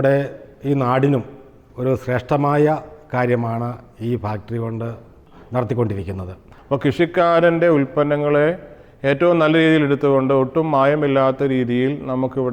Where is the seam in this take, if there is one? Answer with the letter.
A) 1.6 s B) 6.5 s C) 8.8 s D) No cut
B